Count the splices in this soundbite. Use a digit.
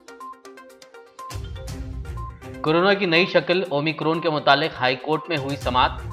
1